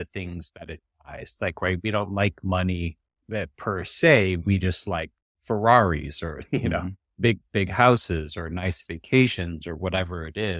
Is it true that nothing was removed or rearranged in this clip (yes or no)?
yes